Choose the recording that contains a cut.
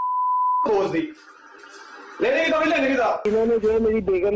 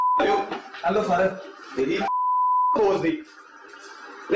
first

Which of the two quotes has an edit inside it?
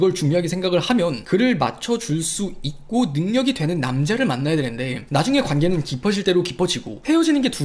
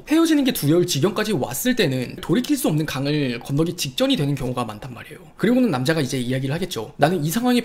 second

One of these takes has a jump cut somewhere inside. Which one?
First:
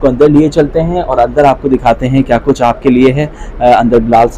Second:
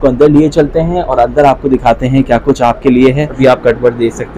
second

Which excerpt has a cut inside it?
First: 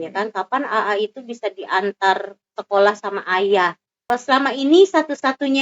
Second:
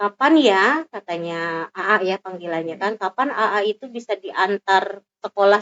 first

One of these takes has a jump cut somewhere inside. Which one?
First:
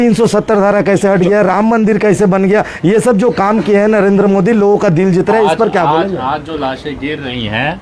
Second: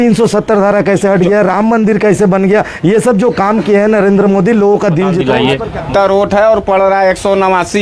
second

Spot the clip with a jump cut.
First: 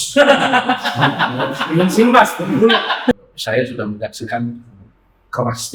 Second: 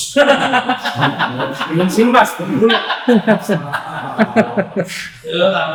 first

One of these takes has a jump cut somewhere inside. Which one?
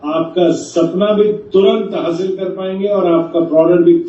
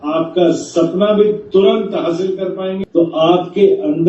second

